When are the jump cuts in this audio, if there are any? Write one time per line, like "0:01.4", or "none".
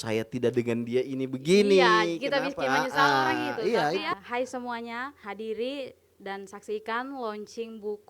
0:04.1
0:05.2

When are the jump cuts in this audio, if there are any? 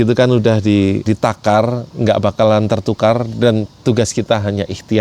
0:01.0

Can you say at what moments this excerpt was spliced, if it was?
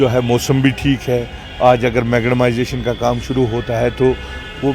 none

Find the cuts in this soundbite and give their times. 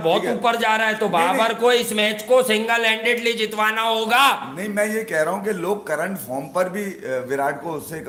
none

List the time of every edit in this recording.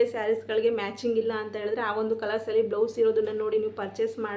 none

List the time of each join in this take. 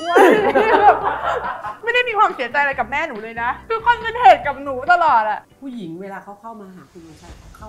0:03.6
0:05.4

